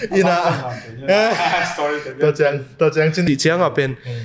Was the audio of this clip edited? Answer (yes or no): yes